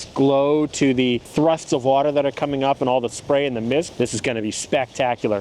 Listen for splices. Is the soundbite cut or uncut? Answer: cut